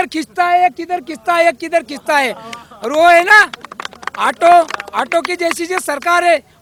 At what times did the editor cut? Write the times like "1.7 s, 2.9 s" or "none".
none